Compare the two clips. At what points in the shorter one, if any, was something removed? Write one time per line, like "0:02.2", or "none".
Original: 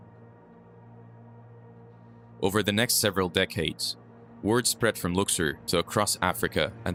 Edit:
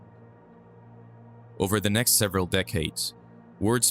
0:01.6